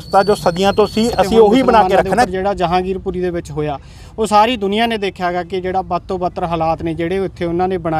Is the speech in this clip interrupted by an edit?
yes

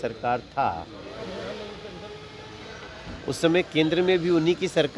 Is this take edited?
no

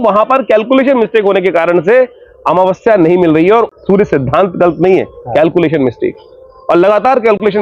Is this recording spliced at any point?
yes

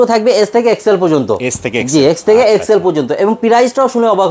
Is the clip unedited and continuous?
yes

